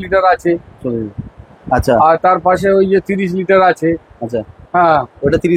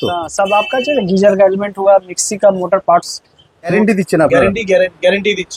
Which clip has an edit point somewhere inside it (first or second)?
second